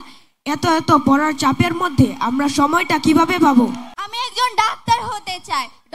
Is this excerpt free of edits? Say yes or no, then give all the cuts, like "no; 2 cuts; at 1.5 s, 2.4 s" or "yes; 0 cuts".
no; 1 cut; at 3.8 s